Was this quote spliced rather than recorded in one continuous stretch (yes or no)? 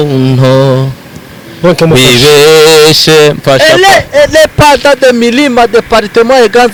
no